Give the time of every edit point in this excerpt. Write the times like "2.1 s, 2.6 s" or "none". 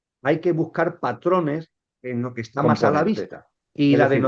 3.2 s